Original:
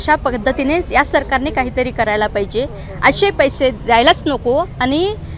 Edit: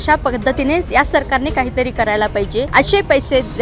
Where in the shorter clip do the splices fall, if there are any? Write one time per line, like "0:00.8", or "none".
0:02.7